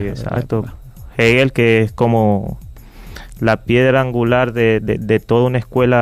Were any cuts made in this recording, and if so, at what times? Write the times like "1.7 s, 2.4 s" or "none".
3.3 s